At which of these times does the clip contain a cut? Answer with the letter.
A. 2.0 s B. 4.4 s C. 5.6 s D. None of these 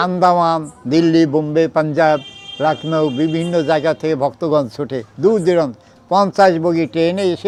D